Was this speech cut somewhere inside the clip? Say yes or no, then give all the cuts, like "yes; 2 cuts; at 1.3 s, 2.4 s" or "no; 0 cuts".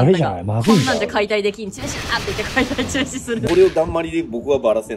yes; 1 cut; at 3.5 s